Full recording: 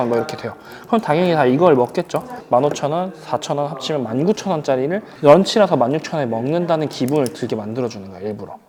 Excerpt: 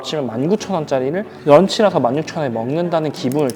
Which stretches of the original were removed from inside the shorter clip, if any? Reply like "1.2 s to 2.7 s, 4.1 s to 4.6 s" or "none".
none